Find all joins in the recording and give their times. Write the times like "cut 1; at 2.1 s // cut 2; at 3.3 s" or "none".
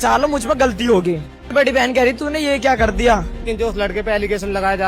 cut 1; at 1.5 s // cut 2; at 3.4 s